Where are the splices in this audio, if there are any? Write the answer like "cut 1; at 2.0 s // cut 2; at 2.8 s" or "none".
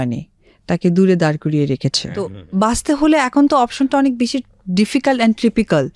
cut 1; at 2.4 s